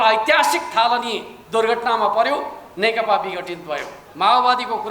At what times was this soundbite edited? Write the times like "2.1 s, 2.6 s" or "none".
4.0 s